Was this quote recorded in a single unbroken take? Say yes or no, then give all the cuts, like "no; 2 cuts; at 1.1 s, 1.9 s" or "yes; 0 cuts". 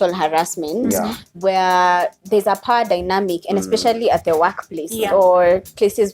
yes; 0 cuts